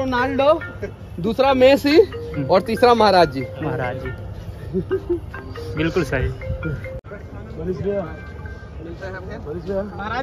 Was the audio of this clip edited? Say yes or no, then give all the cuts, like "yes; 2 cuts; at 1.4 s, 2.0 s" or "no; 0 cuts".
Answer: no; 0 cuts